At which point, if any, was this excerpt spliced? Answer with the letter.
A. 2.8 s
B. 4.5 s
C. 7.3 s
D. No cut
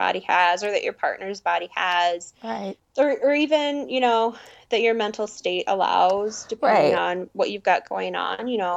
A